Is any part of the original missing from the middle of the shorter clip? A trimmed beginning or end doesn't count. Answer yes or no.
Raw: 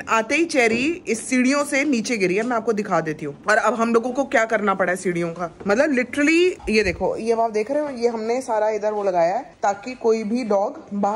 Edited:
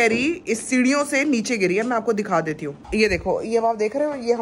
yes